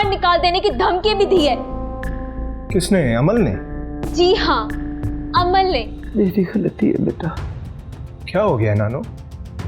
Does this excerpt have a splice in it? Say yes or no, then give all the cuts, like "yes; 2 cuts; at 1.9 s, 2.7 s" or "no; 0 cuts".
yes; 1 cut; at 6.0 s